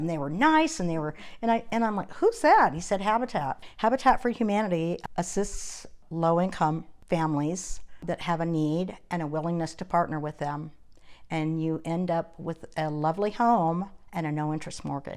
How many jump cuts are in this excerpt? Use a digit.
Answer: 5